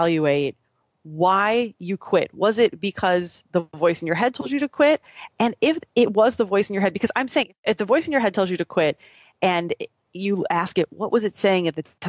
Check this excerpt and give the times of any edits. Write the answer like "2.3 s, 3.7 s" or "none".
7.5 s